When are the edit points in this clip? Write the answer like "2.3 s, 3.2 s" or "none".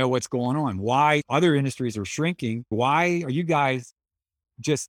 2.7 s